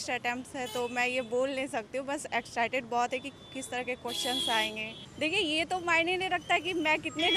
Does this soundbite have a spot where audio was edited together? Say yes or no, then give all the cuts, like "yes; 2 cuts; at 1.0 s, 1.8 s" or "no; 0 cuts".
yes; 1 cut; at 5.0 s